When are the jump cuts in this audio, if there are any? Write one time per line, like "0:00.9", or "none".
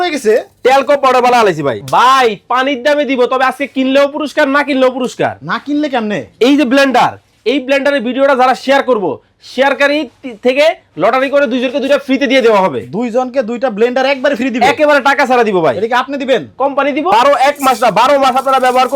0:01.8
0:17.1